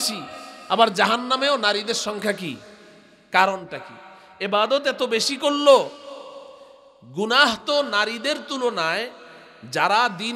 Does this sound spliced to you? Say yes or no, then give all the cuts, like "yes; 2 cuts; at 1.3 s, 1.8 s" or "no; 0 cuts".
no; 0 cuts